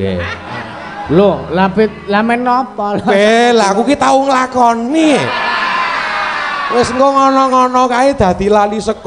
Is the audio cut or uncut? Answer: uncut